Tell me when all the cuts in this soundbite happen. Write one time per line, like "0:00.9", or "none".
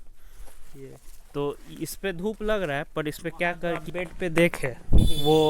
0:03.8